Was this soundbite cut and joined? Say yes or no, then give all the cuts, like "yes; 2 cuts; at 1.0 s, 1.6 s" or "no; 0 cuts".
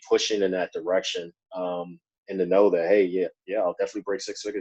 no; 0 cuts